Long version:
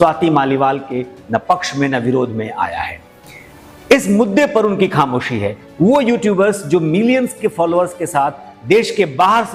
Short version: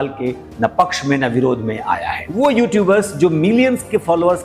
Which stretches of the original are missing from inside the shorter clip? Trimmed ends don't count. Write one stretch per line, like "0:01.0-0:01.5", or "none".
0:03.1-0:05.9